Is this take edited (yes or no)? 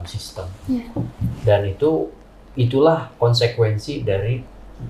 no